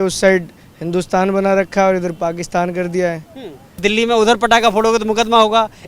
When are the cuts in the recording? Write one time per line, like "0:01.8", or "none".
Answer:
0:03.8